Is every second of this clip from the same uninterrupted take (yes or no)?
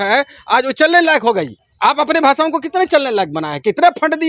no